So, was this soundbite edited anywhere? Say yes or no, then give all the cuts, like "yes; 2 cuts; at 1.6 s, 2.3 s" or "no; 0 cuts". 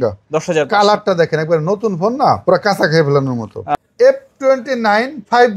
yes; 1 cut; at 3.7 s